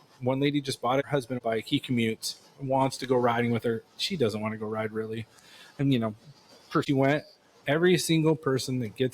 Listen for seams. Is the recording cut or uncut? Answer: cut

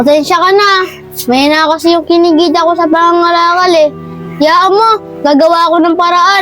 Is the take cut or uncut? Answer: uncut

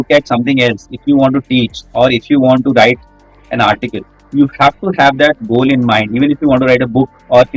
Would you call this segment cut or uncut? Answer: uncut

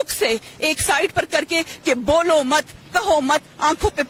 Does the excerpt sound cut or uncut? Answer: uncut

